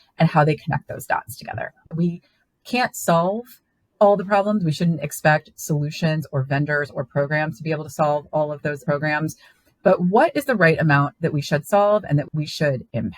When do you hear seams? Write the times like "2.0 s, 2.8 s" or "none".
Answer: 1.9 s, 12.3 s